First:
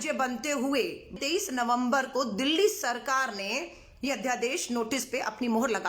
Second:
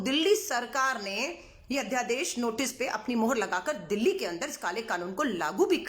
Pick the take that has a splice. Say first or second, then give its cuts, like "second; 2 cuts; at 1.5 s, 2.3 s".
first; 1 cut; at 1.2 s